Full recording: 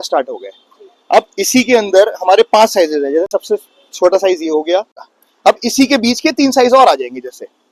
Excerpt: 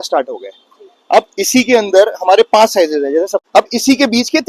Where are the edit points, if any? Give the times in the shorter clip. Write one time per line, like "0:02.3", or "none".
0:03.4